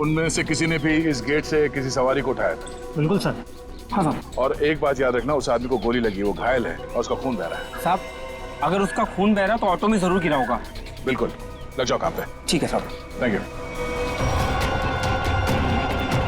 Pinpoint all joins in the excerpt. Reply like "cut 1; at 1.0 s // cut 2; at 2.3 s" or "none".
cut 1; at 14.3 s